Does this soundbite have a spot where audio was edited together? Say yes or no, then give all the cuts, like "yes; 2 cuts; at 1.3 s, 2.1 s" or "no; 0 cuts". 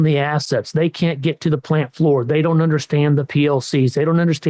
no; 0 cuts